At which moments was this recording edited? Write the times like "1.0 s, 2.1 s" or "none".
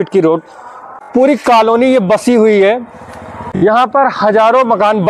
0.8 s, 3.4 s